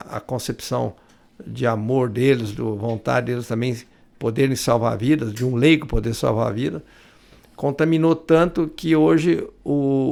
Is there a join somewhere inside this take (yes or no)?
no